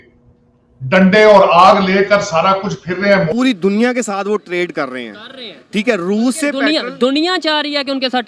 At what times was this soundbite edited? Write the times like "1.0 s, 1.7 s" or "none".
3.3 s

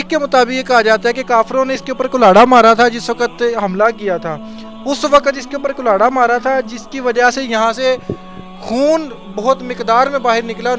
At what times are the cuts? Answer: none

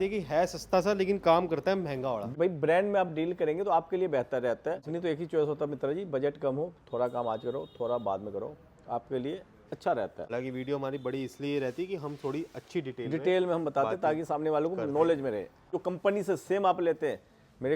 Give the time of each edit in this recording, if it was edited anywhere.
2.3 s, 4.9 s, 10.3 s, 15.8 s

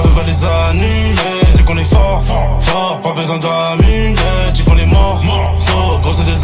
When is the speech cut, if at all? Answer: none

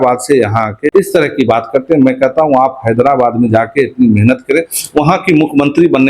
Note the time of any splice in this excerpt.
0.9 s

